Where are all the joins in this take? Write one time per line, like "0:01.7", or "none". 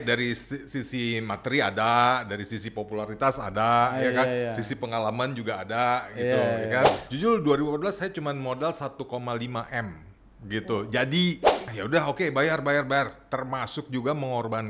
0:07.1
0:11.7